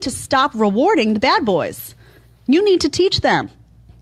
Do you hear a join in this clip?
yes; 1 cut; at 2.2 s

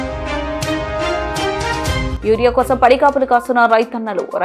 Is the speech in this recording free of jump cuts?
no; 1 cut; at 2.1 s

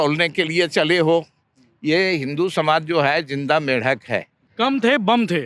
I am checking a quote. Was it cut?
yes; 1 cut; at 4.4 s

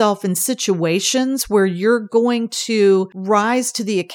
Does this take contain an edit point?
yes; 1 cut; at 3.2 s

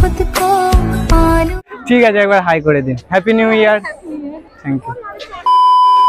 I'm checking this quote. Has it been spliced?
no; 0 cuts

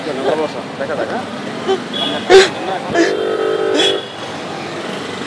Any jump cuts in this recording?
yes; 1 cut; at 2.9 s

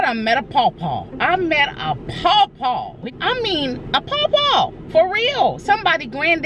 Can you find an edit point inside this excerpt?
yes; 1 cut; at 3.1 s

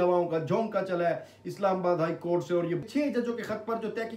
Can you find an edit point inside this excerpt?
yes; 1 cut; at 2.8 s

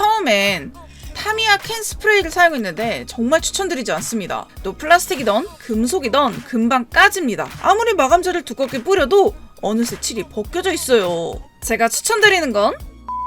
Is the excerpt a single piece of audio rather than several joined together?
no; 1 cut; at 4.4 s

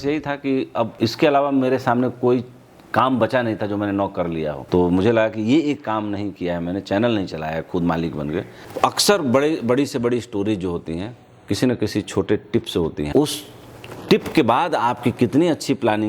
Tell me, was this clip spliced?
yes; 4 cuts; at 0.9 s, 4.6 s, 8.6 s, 13.1 s

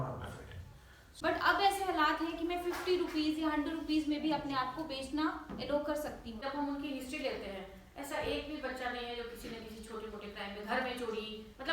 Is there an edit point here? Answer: yes; 2 cuts; at 1.0 s, 6.3 s

